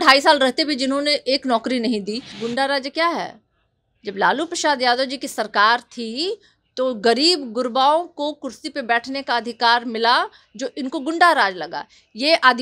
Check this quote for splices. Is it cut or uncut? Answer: cut